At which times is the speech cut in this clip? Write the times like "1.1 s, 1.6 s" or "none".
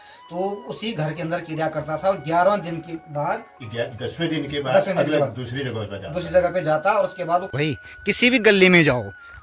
7.5 s